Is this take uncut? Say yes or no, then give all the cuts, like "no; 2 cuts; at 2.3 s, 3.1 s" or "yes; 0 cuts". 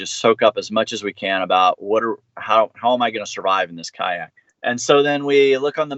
yes; 0 cuts